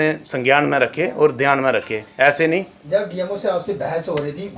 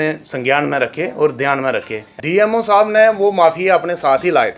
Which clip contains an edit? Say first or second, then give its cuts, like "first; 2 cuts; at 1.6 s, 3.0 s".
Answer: second; 1 cut; at 2.1 s